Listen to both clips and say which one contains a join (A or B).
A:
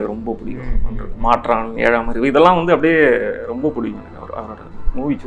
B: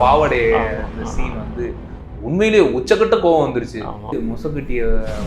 B